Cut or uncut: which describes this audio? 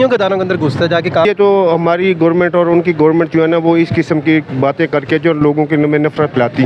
cut